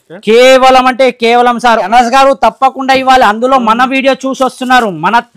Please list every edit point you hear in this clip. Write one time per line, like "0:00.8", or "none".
0:01.9